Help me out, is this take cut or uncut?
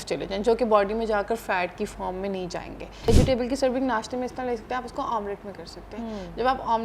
cut